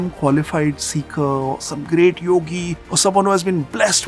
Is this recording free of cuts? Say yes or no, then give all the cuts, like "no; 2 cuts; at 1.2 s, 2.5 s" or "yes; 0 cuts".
yes; 0 cuts